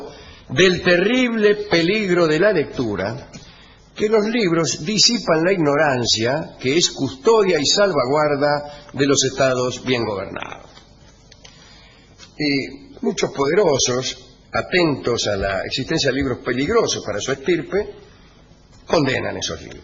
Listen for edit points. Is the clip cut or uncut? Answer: cut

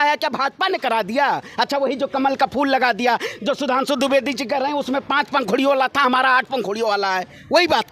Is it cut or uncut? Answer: uncut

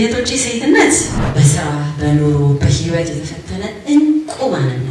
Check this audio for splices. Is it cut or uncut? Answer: cut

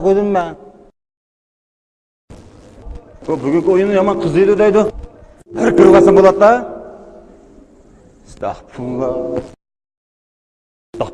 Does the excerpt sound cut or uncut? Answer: cut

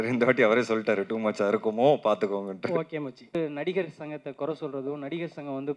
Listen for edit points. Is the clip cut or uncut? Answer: cut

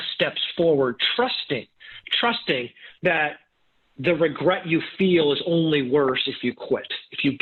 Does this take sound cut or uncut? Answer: uncut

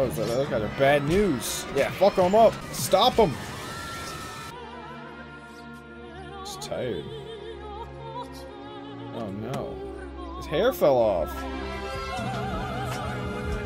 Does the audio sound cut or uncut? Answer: cut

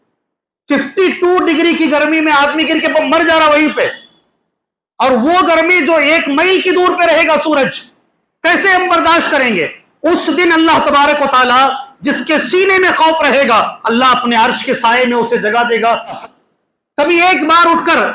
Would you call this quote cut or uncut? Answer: cut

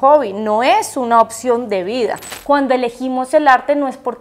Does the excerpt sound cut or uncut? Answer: cut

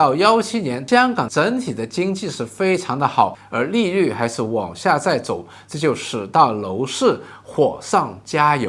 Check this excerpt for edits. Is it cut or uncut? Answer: uncut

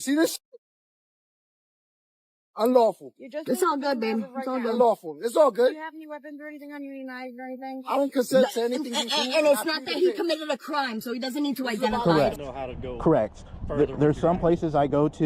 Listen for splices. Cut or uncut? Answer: cut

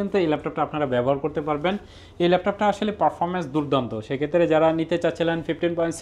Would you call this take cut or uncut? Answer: uncut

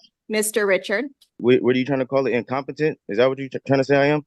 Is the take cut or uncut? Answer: cut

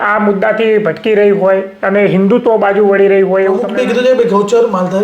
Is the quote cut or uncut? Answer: cut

